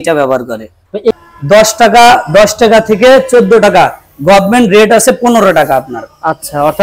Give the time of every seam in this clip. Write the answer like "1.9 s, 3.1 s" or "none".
1.0 s